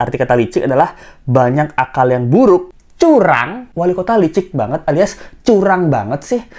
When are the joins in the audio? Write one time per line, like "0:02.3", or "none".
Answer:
0:02.8
0:03.6